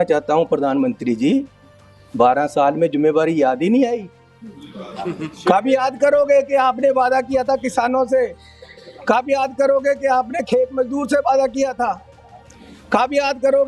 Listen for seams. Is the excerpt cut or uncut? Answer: uncut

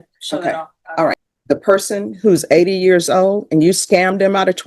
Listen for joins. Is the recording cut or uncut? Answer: cut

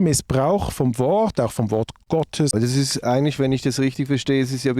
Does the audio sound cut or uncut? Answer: cut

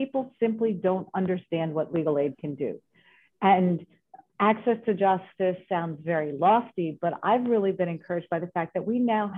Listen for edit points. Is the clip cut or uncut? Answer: uncut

